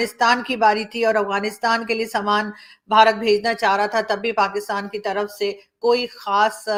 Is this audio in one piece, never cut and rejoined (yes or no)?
yes